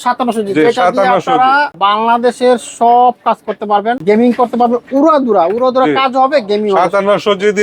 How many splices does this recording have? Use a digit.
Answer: 2